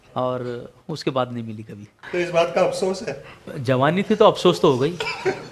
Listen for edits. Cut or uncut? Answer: cut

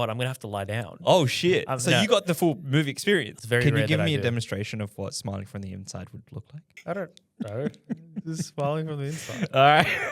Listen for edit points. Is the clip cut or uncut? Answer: cut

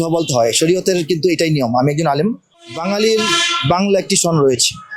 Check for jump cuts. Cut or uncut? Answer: cut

